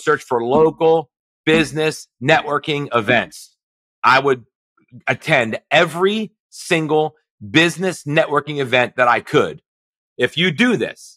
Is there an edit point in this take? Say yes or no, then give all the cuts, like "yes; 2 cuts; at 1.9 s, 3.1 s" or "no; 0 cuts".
yes; 2 cuts; at 3.9 s, 10.0 s